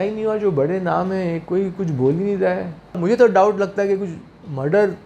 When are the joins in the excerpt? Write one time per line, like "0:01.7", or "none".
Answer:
0:03.0